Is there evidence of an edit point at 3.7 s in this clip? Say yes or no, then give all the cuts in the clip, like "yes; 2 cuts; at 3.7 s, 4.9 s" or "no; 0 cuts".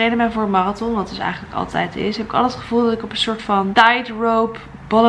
yes; 1 cut; at 3.7 s